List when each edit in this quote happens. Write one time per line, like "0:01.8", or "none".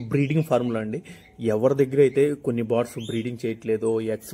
none